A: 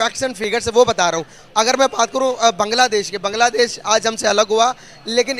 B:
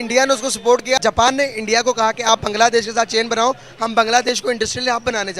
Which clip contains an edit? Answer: B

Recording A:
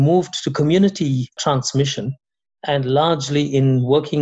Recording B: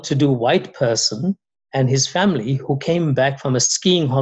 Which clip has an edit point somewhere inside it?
A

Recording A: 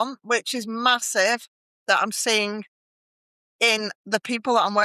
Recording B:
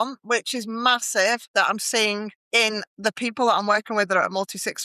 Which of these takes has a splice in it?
B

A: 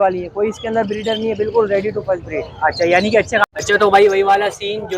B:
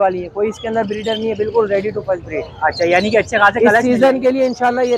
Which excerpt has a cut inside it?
A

